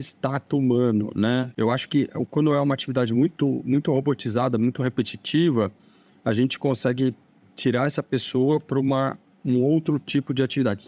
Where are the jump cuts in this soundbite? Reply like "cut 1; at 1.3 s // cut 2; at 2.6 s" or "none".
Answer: cut 1; at 1.5 s